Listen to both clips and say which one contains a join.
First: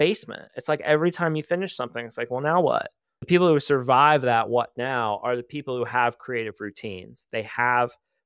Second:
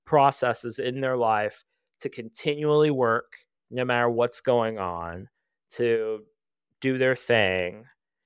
first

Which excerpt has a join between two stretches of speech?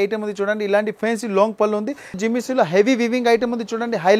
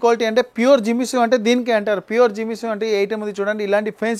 first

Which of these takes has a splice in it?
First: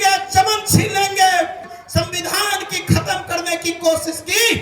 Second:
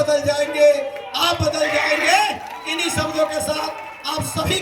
first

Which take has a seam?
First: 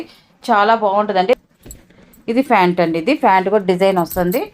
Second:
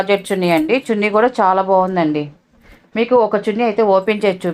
first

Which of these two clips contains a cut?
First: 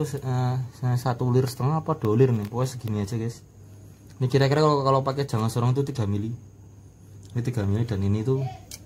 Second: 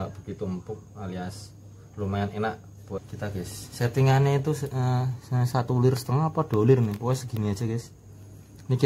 second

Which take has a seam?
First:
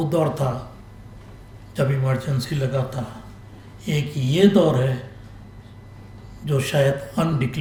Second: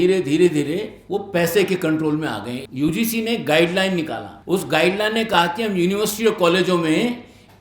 second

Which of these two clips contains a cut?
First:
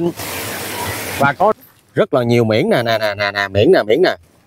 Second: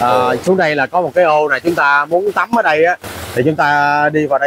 first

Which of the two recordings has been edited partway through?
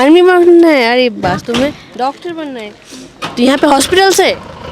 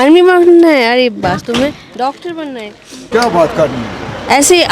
second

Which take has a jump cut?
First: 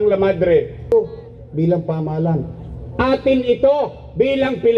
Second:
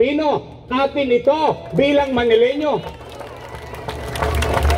first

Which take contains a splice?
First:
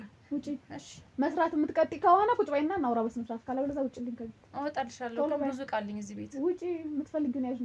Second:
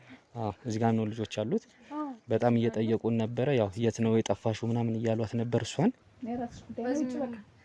second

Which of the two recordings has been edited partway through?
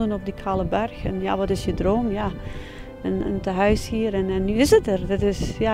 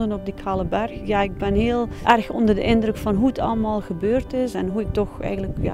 second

